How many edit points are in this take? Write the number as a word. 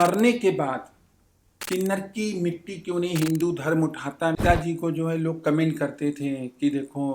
one